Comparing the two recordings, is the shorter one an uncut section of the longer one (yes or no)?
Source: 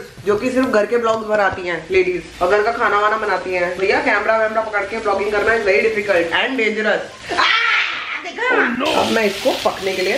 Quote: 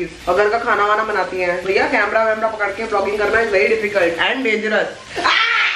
yes